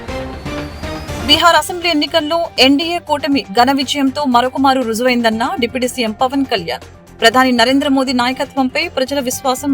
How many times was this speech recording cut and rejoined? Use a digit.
1